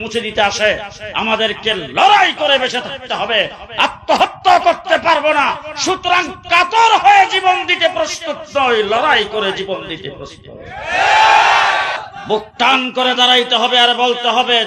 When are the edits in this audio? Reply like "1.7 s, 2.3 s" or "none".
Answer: 12.1 s